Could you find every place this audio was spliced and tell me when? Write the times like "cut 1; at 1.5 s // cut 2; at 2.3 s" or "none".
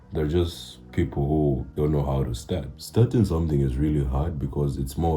cut 1; at 1.7 s // cut 2; at 2.8 s